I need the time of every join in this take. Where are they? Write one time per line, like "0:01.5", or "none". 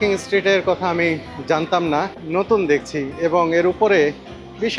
0:02.2